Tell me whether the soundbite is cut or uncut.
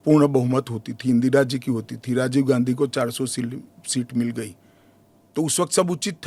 uncut